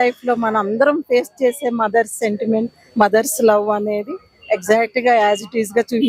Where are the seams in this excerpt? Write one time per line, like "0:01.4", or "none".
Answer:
none

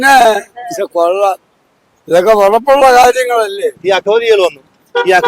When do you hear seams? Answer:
0:03.8

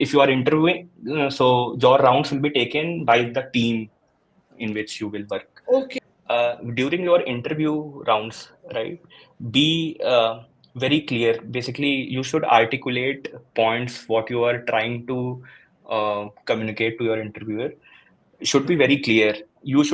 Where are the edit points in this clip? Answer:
0:05.9

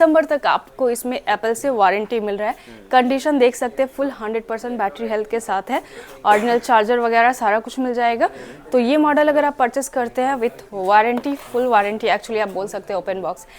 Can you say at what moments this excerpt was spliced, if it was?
none

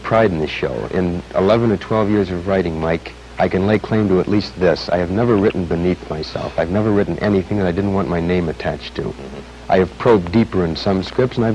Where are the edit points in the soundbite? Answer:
0:07.3

